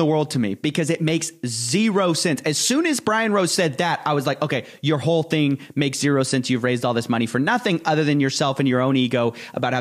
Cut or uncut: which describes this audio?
uncut